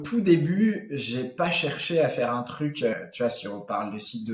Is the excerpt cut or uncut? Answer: cut